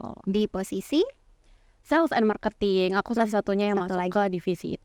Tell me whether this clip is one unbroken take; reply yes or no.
yes